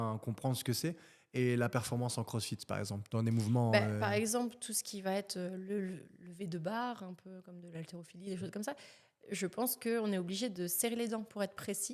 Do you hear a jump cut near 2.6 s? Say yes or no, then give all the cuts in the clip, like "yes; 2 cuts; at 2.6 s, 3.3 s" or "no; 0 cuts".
no; 0 cuts